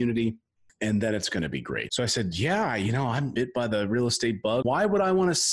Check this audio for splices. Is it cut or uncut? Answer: cut